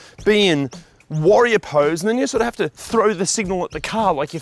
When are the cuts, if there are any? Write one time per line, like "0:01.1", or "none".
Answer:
none